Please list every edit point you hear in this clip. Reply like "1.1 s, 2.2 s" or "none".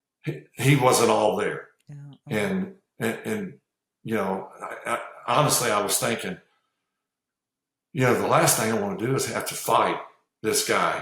none